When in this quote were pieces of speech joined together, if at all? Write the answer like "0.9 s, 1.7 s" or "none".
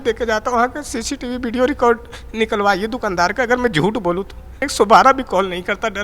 4.6 s